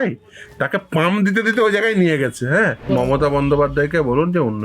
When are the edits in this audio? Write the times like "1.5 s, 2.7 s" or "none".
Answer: 2.8 s